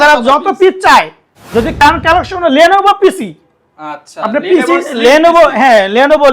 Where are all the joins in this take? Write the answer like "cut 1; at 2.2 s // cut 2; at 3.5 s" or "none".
cut 1; at 1.8 s

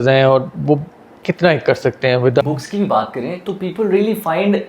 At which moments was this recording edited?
cut 1; at 2.4 s

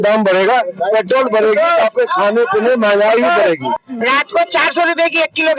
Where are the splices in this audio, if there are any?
cut 1; at 3.8 s

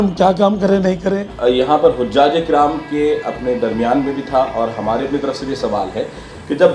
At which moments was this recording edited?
cut 1; at 1.2 s

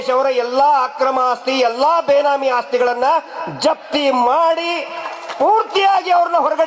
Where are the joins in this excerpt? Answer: none

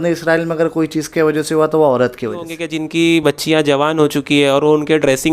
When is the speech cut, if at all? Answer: cut 1; at 2.8 s

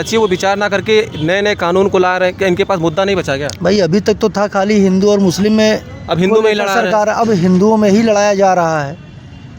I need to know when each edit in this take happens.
none

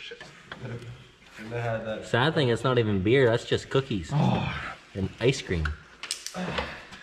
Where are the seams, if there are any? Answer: none

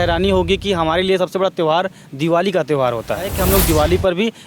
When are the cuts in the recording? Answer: cut 1; at 3.3 s

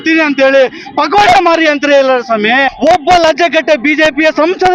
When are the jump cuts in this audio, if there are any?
cut 1; at 2.7 s

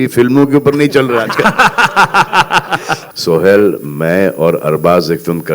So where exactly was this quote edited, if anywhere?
cut 1; at 3.0 s

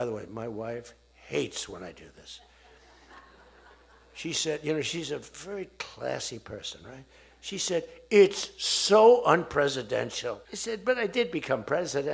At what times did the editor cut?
cut 1; at 10.5 s

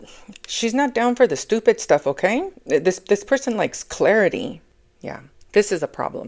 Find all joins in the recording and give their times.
cut 1; at 2.6 s // cut 2; at 4.6 s

